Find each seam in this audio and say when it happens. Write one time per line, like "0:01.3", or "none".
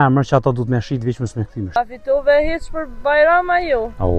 0:01.8

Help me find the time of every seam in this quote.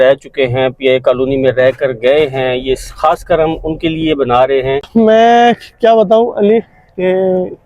0:04.9

